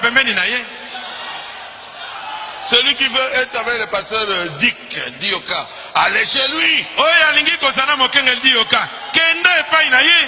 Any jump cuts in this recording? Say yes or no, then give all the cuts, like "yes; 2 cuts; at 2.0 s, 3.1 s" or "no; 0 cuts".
no; 0 cuts